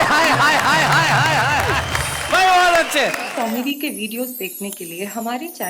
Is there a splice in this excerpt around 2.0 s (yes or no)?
no